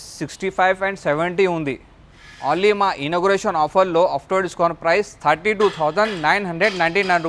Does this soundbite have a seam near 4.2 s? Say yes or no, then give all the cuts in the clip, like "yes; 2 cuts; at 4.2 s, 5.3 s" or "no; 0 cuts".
no; 0 cuts